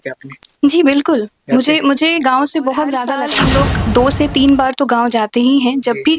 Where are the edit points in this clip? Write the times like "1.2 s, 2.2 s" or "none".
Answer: 3.2 s